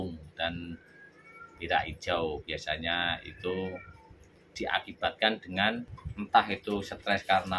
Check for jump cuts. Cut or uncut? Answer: cut